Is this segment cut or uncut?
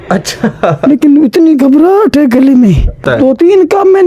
cut